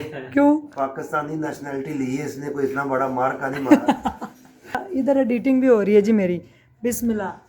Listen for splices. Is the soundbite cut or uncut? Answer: cut